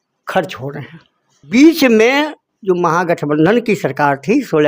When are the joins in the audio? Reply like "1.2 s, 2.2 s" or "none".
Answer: 1.5 s